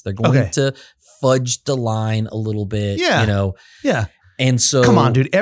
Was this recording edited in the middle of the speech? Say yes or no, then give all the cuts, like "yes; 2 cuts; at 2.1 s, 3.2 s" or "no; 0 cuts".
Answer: no; 0 cuts